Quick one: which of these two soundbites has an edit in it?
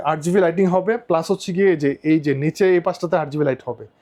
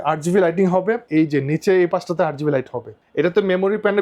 second; 2 cuts; at 1.0 s, 3.0 s

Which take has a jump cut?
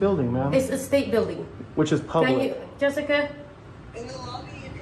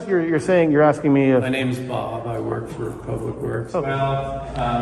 second; 1 cut; at 3.6 s

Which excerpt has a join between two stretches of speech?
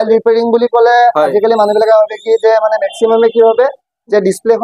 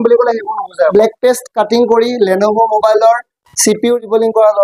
second; 1 cut; at 0.9 s

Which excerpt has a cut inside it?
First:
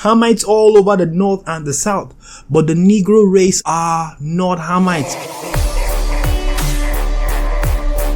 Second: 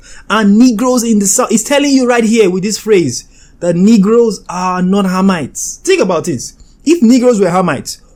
first; 2 cuts; at 3.6 s, 5.1 s

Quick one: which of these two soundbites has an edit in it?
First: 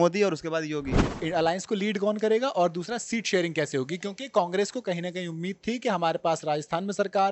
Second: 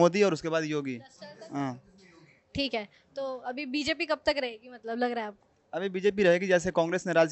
first; 1 cut; at 1.2 s

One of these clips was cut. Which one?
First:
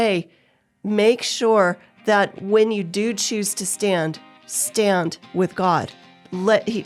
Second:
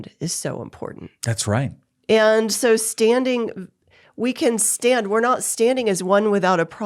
second; 1 cut; at 1.9 s

